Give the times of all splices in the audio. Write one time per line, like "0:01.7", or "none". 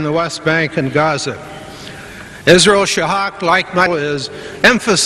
none